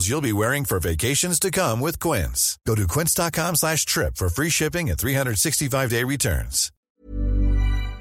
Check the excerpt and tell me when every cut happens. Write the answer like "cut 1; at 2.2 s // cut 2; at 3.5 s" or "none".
cut 1; at 7.1 s

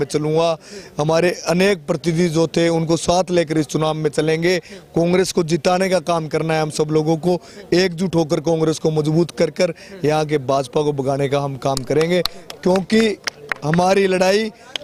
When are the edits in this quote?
none

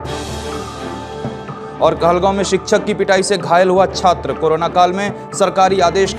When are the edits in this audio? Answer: none

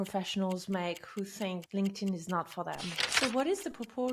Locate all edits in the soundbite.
cut 1; at 1.6 s // cut 2; at 3.0 s

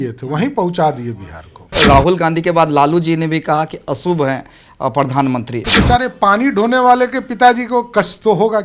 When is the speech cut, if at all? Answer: cut 1; at 1.7 s // cut 2; at 5.7 s

